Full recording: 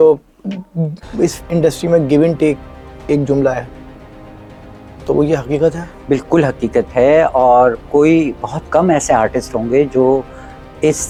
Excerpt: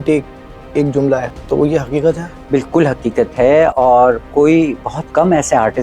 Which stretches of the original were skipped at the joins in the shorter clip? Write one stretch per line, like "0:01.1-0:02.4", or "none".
0:03.7-0:04.9